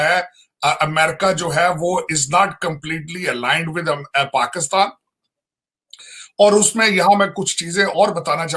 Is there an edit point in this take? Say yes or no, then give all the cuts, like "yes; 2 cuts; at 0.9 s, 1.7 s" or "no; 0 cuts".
no; 0 cuts